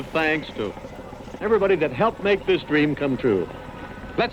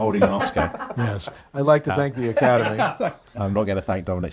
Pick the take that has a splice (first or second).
second